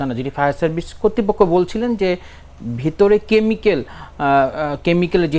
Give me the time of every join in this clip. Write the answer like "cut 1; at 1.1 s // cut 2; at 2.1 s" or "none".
none